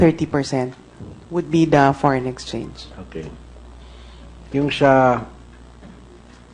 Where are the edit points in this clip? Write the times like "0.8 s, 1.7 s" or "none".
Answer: 1.4 s

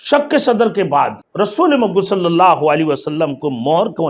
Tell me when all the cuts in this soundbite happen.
1.2 s

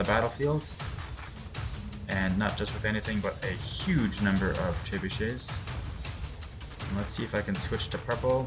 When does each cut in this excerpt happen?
none

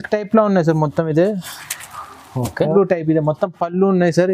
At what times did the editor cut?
2.7 s

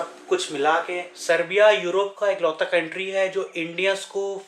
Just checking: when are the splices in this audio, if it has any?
1.1 s

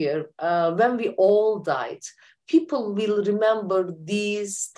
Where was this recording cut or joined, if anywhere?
none

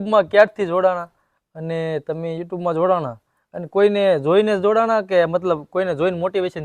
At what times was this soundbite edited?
none

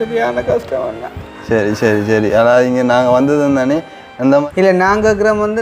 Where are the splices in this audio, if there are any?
4.4 s

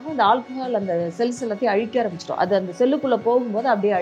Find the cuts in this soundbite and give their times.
none

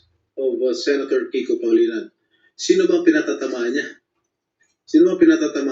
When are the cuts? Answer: none

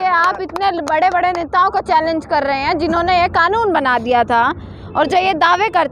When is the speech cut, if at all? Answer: none

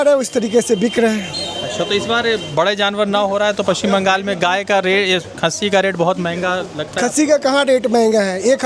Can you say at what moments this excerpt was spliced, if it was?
none

